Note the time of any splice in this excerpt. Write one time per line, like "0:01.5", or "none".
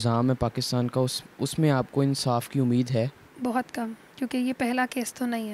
0:03.2
0:04.0